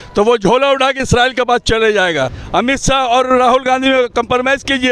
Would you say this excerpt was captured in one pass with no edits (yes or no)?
no